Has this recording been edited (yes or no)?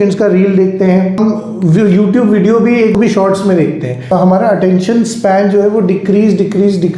yes